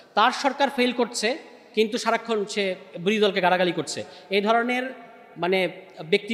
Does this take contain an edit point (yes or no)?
no